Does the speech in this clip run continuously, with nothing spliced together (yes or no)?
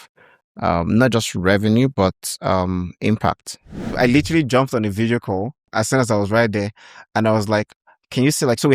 no